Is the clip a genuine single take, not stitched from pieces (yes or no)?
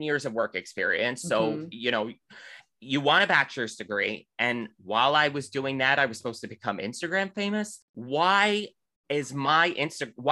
no